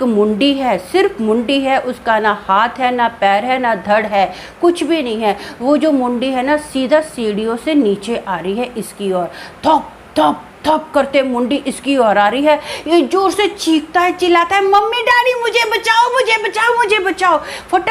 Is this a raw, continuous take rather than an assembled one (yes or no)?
yes